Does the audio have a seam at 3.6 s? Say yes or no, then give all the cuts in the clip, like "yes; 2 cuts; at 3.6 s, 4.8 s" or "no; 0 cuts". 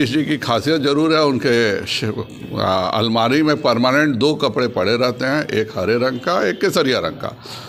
no; 0 cuts